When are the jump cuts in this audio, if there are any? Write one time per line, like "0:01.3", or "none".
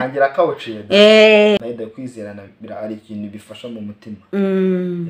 0:01.6